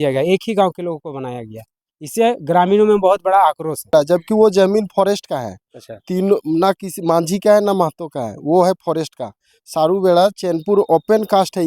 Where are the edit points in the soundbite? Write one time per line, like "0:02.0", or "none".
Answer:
0:03.9